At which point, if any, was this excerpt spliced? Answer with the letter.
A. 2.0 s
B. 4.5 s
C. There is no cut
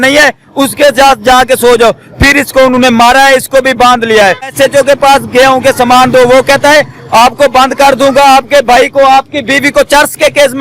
B